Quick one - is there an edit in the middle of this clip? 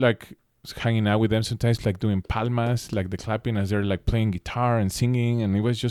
no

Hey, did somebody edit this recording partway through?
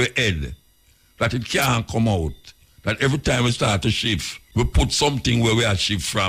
yes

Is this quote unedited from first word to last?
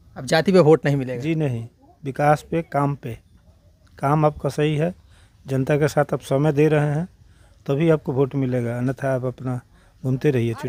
yes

